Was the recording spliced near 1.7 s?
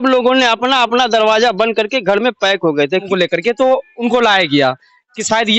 no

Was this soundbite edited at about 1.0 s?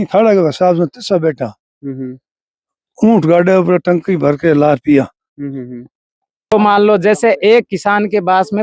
no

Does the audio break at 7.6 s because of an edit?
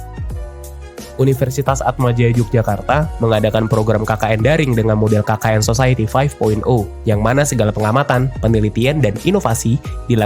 no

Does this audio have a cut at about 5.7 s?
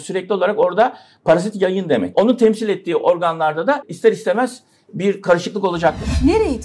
no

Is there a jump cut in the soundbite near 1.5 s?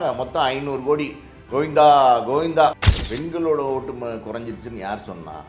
no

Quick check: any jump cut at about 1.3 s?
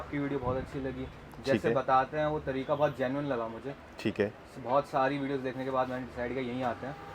no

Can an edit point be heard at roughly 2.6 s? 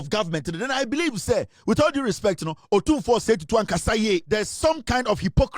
no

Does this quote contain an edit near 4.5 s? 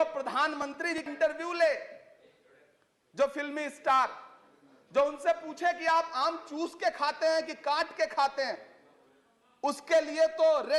no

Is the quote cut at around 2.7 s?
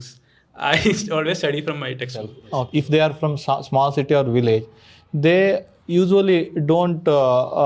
yes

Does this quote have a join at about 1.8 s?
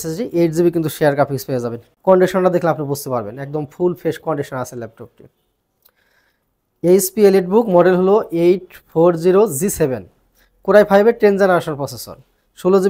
yes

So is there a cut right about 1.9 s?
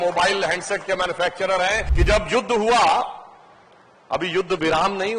yes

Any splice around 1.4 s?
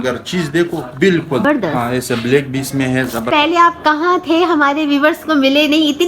yes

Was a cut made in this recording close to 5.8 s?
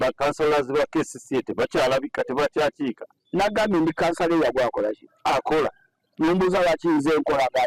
no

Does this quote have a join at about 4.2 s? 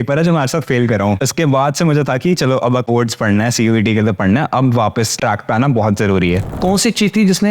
no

